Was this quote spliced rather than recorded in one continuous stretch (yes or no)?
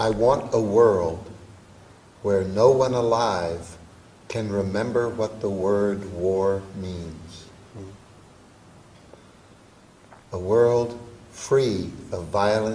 yes